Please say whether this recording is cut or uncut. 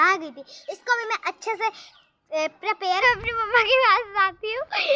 cut